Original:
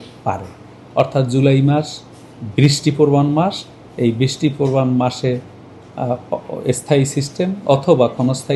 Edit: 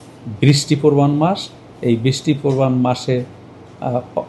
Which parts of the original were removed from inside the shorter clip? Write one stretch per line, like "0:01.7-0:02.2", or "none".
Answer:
none